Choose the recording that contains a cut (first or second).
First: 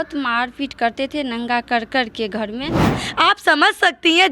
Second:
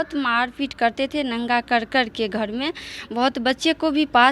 first